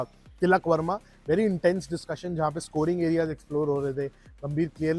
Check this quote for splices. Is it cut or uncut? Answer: uncut